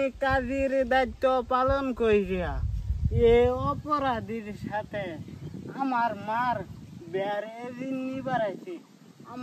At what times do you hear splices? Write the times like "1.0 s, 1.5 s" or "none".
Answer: none